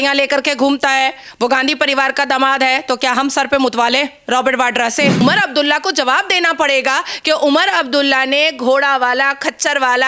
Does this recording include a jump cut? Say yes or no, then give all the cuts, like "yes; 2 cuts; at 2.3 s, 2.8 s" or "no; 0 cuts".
yes; 1 cut; at 5.2 s